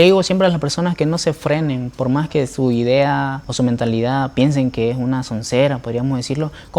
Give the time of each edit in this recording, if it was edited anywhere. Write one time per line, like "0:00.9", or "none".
0:03.4